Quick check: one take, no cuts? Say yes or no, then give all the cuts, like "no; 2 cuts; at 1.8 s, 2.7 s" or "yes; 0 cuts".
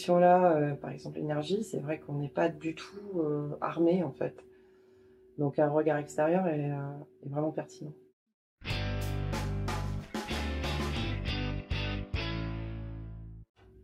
yes; 0 cuts